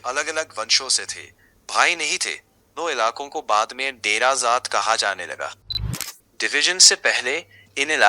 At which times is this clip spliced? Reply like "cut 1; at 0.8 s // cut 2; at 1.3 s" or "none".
cut 1; at 5.9 s